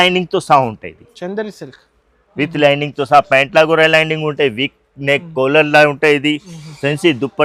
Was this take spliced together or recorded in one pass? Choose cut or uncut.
uncut